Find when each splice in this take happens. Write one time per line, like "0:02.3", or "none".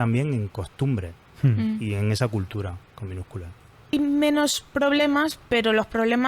0:03.9